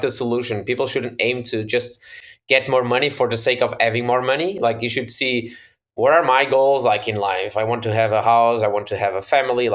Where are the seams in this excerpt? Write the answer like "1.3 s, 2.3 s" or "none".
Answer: none

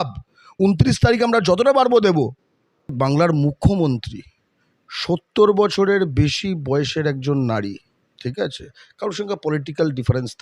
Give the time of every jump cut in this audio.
2.9 s

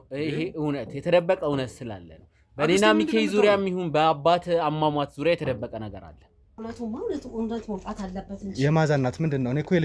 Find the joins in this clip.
6.5 s

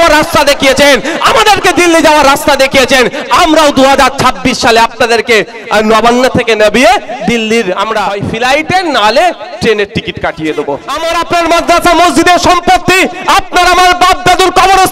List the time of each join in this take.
8.1 s, 11.0 s

